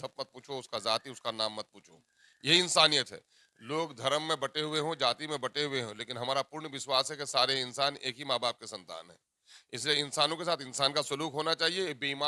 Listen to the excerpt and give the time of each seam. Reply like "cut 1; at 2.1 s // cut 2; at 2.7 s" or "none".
none